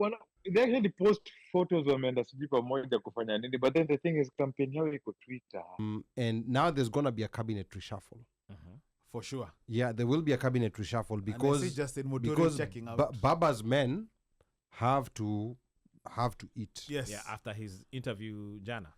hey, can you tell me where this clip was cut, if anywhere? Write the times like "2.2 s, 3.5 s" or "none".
5.8 s